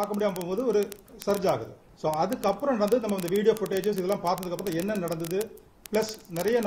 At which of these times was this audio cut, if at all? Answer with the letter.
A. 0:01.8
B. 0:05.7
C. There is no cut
C